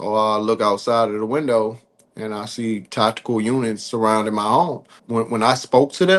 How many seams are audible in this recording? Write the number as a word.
one